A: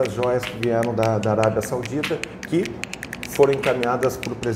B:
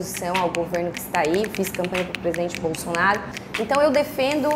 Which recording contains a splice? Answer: B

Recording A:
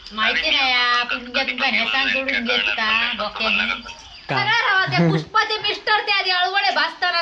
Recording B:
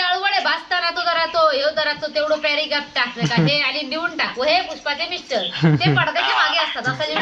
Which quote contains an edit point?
A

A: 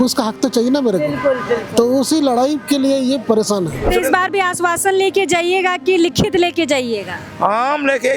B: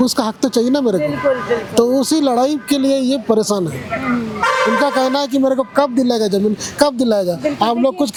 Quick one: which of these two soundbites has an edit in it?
A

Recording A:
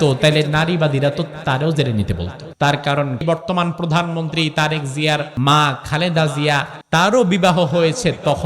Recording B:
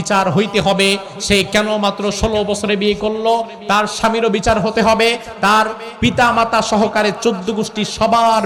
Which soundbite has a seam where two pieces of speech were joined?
A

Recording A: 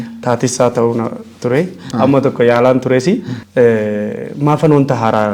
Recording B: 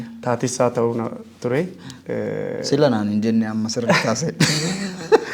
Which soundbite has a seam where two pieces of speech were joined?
A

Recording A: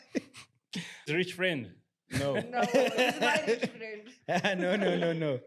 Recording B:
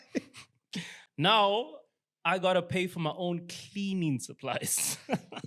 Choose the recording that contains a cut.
A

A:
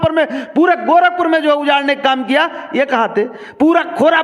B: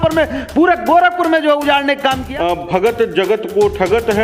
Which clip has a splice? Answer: B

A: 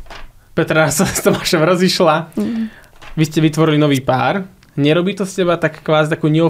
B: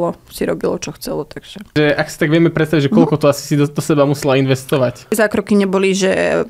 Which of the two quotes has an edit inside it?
B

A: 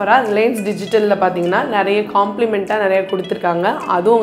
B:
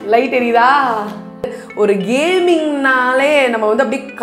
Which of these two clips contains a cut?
B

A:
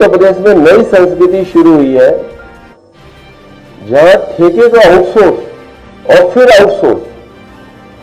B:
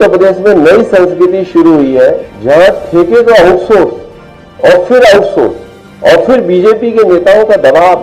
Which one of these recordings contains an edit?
B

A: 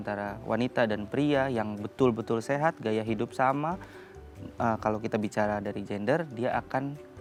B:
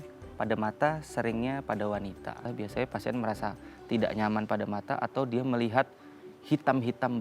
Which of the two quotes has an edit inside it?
B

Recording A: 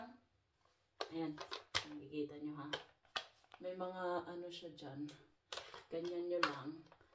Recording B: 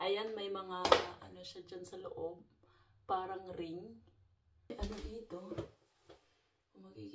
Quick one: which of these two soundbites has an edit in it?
B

